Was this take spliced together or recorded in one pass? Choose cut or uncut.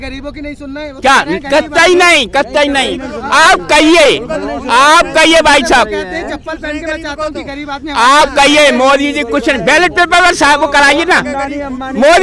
uncut